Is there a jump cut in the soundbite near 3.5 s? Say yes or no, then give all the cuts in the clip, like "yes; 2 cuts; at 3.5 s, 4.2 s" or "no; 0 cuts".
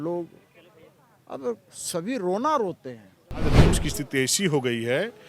yes; 1 cut; at 3.5 s